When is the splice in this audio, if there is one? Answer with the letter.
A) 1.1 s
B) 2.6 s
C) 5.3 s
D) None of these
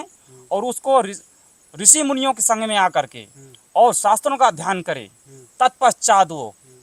D